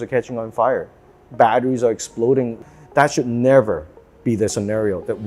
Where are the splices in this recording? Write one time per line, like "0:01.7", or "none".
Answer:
0:02.6